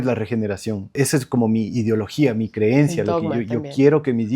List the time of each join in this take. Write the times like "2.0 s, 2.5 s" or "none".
1.0 s